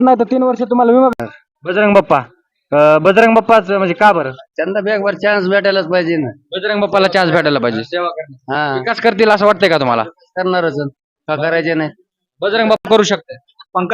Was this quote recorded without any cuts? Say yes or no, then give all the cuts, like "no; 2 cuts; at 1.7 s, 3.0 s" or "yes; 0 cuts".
no; 2 cuts; at 1.1 s, 12.8 s